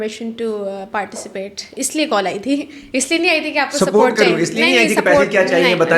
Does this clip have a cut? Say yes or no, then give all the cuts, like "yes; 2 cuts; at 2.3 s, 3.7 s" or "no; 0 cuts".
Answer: no; 0 cuts